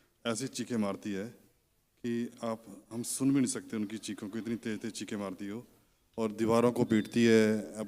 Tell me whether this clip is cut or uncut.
uncut